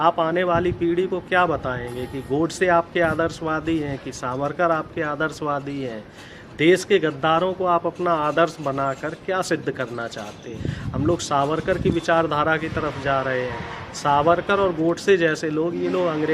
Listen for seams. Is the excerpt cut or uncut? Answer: cut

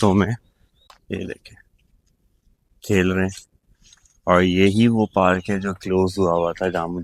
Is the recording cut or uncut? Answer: uncut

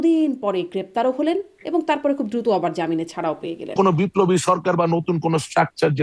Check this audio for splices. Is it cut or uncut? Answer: cut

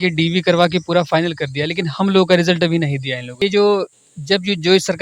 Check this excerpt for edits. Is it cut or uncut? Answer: cut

